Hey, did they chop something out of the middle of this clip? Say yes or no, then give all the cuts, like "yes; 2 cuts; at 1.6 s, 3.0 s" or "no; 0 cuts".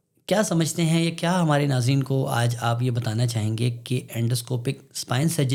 no; 0 cuts